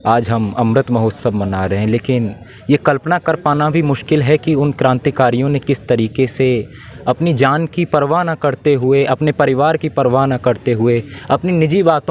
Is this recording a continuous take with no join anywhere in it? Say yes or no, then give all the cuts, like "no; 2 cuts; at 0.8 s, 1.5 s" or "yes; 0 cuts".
yes; 0 cuts